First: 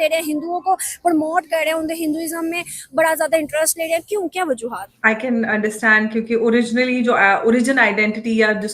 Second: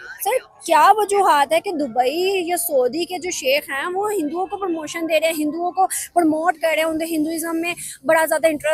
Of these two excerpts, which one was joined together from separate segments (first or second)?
first